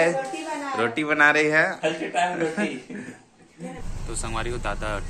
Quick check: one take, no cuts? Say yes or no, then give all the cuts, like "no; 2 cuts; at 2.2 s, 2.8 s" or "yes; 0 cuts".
no; 1 cut; at 3.8 s